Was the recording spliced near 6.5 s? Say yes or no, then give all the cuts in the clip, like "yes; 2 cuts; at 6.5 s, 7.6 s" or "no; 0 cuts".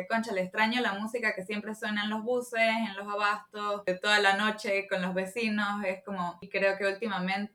yes; 2 cuts; at 3.8 s, 6.5 s